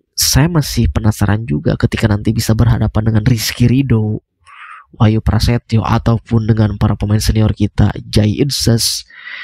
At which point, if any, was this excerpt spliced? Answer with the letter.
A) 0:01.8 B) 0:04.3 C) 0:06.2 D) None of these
D